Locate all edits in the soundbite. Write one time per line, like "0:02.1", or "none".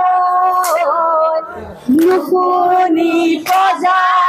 none